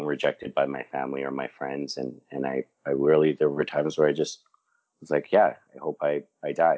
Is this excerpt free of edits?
yes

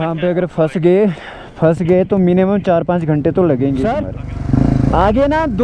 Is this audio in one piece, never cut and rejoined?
no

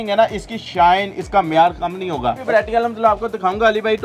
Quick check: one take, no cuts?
no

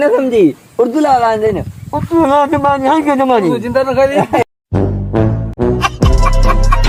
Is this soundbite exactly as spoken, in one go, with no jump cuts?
yes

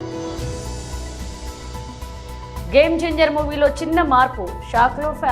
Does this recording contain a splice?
no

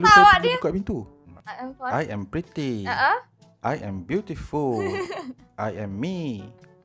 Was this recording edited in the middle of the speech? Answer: yes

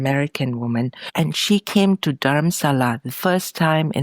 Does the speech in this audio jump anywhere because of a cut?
yes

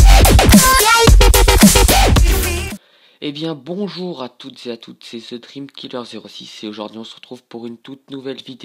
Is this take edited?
yes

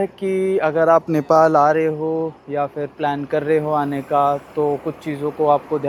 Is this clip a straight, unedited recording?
yes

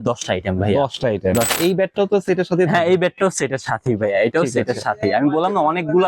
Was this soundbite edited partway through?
yes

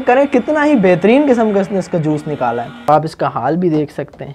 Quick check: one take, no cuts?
no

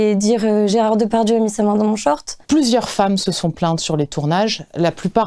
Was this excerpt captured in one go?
no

